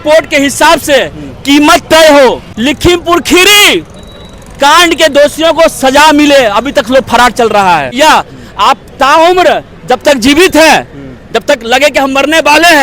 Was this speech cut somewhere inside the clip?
yes; 2 cuts; at 2.5 s, 8.0 s

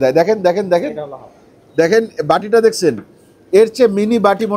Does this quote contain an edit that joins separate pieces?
no; 0 cuts

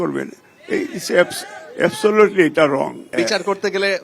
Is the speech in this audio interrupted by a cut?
yes; 1 cut; at 3.1 s

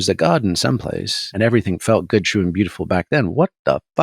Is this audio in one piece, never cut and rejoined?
no; 1 cut; at 1.3 s

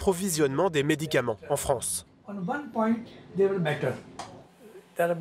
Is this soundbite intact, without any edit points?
yes; 0 cuts

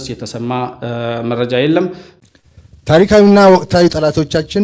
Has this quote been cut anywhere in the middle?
yes; 1 cut; at 2.1 s

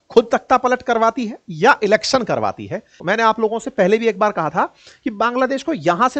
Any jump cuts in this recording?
yes; 1 cut; at 2.9 s

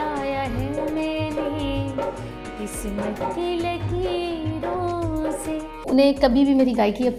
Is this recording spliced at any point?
yes; 1 cut; at 5.8 s

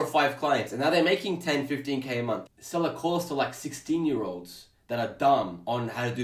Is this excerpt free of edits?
no; 1 cut; at 2.4 s

